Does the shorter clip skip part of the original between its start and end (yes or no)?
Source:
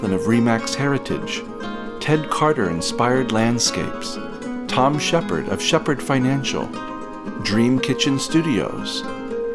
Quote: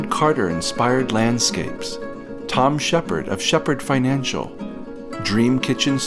no